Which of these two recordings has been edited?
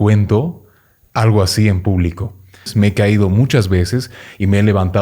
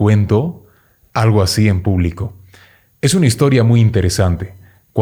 first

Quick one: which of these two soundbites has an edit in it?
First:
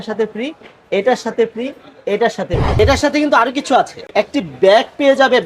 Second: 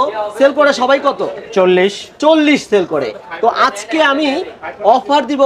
first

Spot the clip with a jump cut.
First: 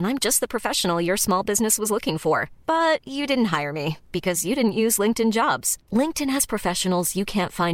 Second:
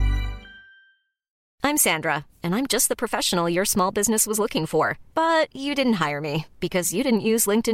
second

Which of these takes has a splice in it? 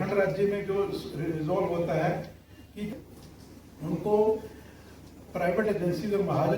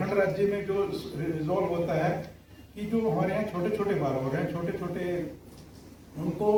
first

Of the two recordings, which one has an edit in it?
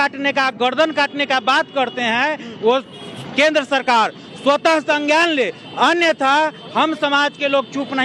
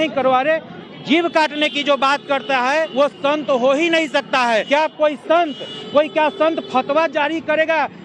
second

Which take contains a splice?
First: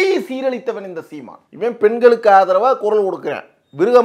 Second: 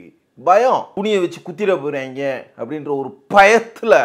second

